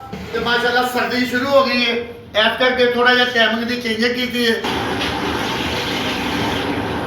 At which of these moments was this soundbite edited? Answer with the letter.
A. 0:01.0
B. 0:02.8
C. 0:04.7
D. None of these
C